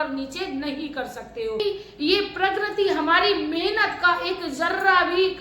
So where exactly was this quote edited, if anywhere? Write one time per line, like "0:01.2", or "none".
0:01.6